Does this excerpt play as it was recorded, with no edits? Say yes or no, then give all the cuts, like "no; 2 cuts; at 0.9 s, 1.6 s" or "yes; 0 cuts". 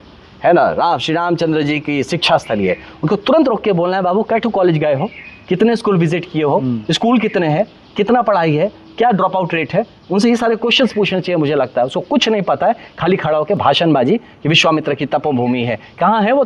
yes; 0 cuts